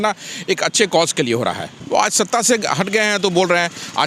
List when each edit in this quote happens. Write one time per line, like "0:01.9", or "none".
0:01.7